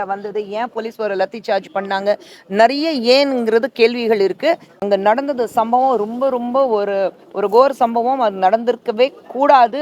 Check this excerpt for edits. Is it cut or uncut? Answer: cut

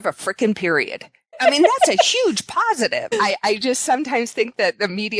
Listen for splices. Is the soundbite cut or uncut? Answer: cut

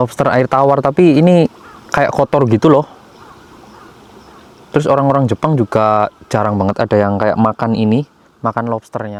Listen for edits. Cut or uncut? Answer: uncut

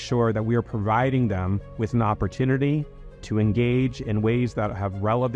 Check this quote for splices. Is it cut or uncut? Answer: uncut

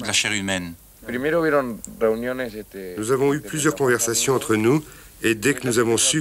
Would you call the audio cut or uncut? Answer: cut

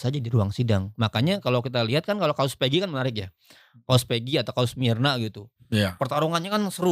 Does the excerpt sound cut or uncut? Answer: uncut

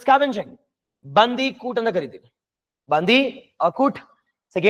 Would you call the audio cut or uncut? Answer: uncut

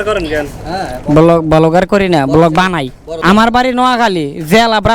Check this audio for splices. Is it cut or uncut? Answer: uncut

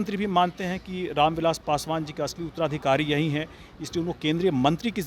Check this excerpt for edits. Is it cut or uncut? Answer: uncut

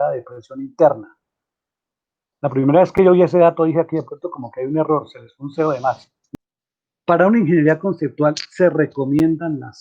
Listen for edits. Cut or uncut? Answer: cut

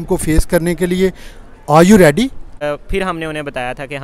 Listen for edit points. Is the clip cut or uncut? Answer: cut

